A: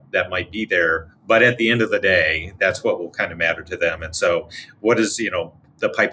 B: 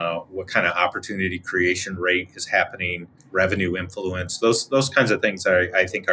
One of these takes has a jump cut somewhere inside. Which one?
B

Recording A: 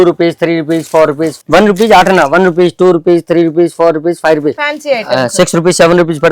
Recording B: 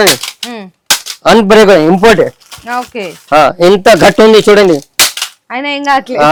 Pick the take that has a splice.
A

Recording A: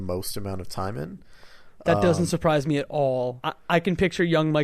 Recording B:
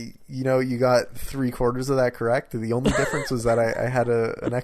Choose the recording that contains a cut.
A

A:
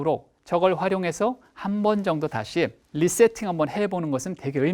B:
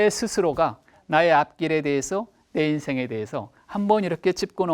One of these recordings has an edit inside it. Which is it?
A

